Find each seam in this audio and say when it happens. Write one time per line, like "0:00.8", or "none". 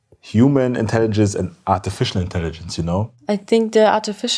0:03.1